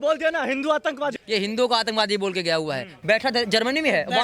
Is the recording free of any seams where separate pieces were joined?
no; 2 cuts; at 1.2 s, 2.9 s

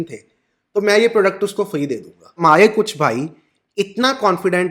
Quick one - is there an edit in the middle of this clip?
yes; 1 cut; at 2.3 s

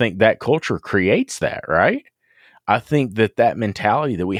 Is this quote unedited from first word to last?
yes; 0 cuts

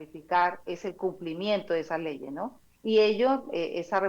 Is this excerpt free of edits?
no; 1 cut; at 2.7 s

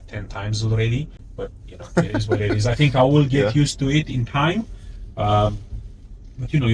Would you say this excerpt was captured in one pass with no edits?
yes; 0 cuts

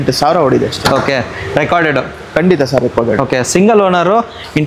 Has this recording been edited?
no; 0 cuts

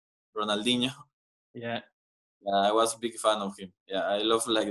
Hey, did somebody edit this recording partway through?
no; 0 cuts

